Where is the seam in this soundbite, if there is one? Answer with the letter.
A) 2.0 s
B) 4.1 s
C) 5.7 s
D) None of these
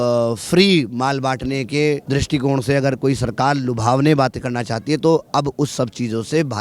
A